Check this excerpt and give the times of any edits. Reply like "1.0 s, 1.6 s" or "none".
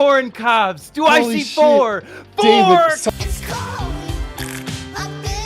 3.1 s